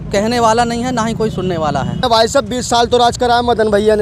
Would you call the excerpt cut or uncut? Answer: cut